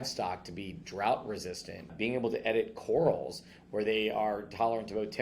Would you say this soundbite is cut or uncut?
cut